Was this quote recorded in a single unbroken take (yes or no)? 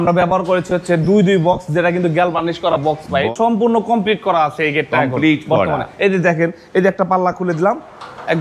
no